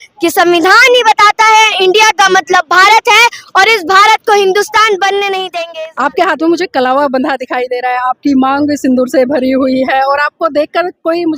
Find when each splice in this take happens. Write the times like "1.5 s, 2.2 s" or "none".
5.5 s